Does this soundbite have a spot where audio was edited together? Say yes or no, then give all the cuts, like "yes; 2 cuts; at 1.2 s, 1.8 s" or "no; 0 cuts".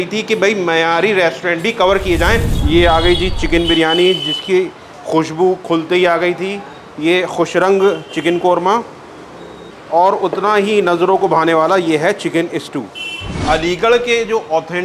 yes; 2 cuts; at 2.5 s, 13.4 s